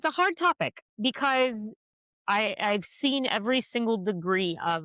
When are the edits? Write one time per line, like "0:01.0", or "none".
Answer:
none